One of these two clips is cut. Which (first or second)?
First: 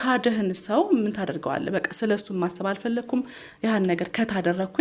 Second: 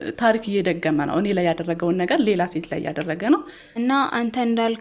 second